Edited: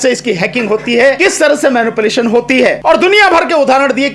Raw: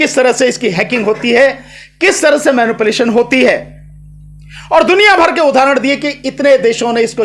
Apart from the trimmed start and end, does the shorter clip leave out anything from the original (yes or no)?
yes